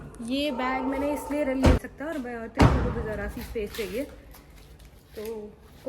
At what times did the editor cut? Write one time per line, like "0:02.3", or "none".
0:01.8